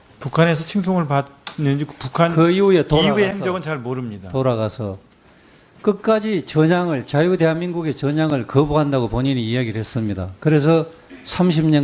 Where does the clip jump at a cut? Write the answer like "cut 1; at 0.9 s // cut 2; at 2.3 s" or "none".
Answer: cut 1; at 3.6 s